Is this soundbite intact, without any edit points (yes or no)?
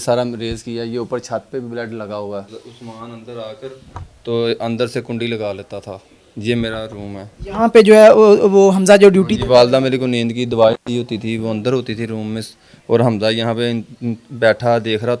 no